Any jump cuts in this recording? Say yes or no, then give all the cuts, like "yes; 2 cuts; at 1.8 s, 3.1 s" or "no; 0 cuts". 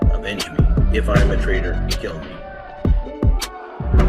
yes; 1 cut; at 2.5 s